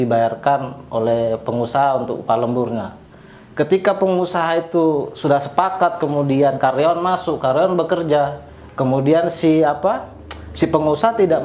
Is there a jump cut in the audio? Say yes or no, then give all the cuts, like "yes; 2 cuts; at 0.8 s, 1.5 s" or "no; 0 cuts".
no; 0 cuts